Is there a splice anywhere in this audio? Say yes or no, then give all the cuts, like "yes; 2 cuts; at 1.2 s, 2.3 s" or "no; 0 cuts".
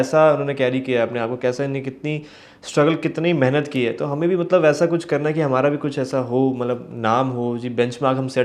no; 0 cuts